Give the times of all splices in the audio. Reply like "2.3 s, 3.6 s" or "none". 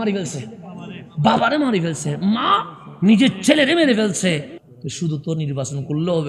4.5 s

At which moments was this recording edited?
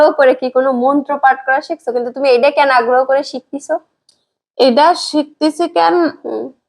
none

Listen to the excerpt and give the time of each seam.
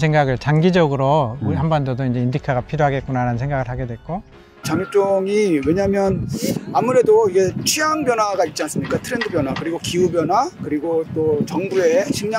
4.5 s

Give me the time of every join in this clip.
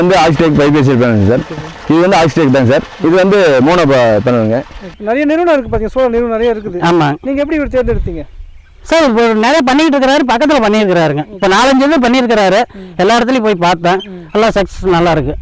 4.8 s

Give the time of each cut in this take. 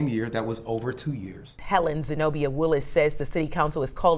1.6 s

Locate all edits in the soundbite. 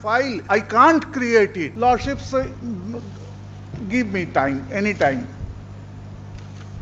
1.7 s

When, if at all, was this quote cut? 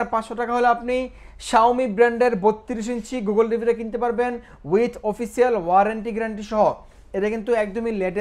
none

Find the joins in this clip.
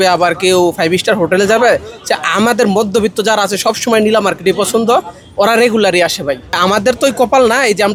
none

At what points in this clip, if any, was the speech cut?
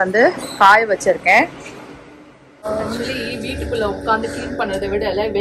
2.6 s

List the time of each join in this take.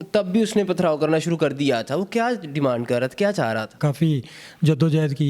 3.8 s

